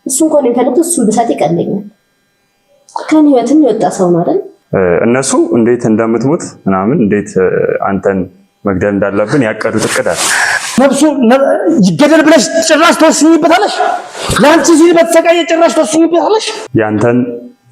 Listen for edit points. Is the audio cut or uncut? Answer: cut